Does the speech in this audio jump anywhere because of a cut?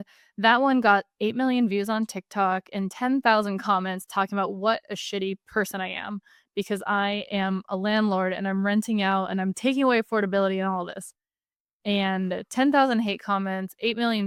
no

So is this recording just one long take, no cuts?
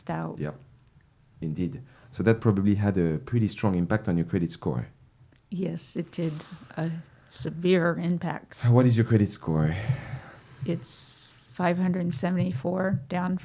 yes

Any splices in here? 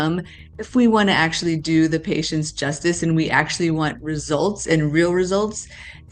no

